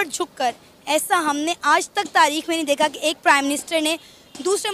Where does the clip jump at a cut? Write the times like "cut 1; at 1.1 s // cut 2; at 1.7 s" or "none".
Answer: none